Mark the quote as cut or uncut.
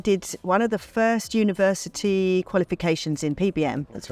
uncut